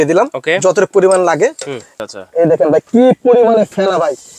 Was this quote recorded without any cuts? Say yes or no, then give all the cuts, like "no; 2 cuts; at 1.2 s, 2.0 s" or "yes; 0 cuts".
no; 1 cut; at 1.8 s